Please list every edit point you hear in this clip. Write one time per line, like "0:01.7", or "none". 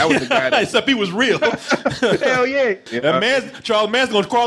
0:02.9